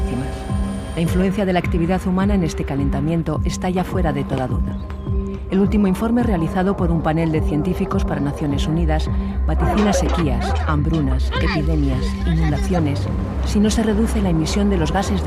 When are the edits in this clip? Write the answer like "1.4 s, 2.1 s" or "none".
8.1 s